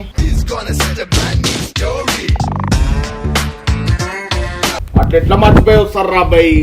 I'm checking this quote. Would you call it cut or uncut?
cut